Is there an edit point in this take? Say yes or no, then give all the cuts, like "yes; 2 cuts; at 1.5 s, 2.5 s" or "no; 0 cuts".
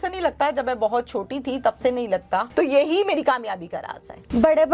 yes; 1 cut; at 2.5 s